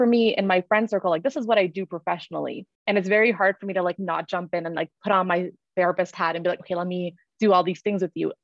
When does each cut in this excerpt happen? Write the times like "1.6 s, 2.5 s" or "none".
2.7 s

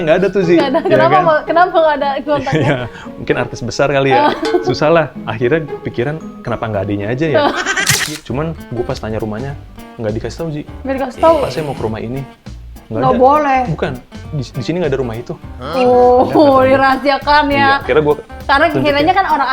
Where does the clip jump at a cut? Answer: 8.0 s

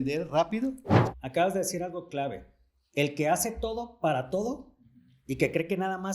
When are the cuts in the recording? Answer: 0.9 s

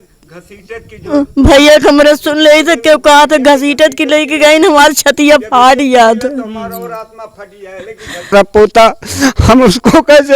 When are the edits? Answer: 8.3 s

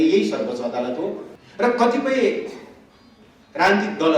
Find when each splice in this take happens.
1.2 s

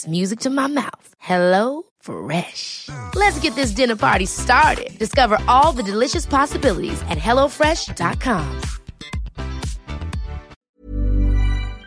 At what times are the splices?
10.5 s

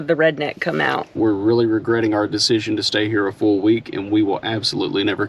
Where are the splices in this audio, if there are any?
1.1 s

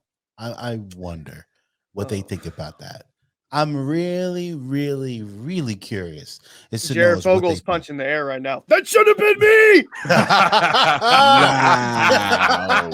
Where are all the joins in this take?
none

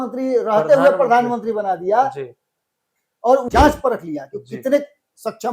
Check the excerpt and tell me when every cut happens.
3.5 s

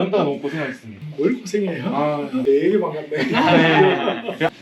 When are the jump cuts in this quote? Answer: 2.4 s

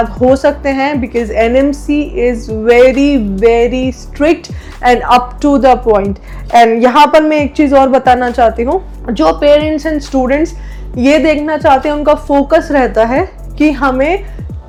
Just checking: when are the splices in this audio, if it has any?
none

